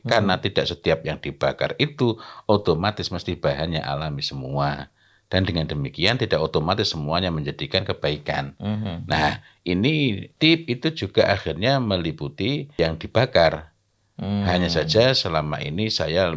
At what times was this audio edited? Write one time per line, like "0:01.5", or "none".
0:10.3
0:12.7